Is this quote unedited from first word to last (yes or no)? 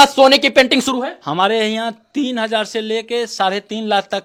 yes